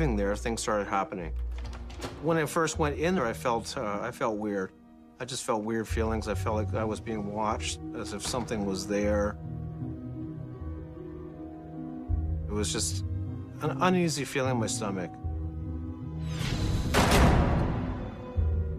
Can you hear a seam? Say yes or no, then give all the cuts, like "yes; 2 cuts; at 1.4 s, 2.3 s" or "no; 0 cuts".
no; 0 cuts